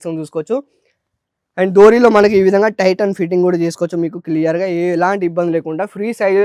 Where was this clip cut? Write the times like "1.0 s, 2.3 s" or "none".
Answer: none